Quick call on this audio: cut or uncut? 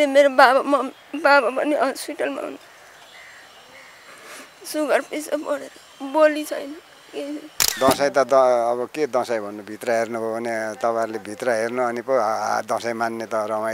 cut